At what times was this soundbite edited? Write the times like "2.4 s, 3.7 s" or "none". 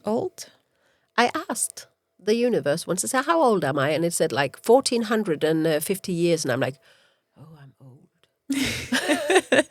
none